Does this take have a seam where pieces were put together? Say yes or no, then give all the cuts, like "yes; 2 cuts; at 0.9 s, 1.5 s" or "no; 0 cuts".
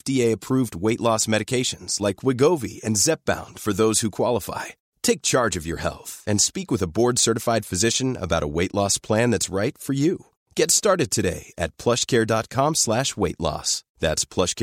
no; 0 cuts